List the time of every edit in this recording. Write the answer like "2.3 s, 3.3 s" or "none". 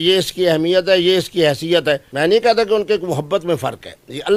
none